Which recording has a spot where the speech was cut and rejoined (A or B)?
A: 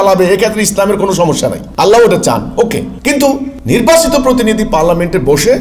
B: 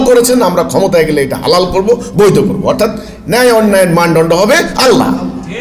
A